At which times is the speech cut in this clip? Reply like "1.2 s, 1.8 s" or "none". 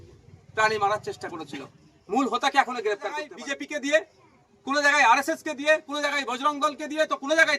3.4 s